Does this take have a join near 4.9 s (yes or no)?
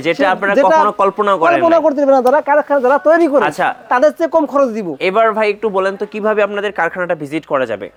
no